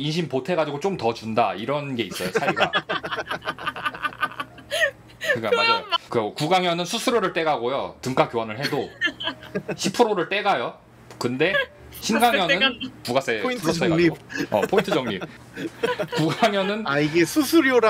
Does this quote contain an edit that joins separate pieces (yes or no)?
yes